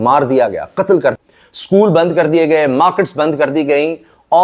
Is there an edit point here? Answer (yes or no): yes